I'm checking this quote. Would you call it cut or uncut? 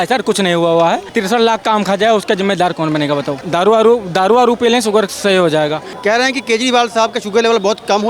cut